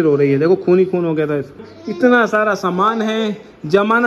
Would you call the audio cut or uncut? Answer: cut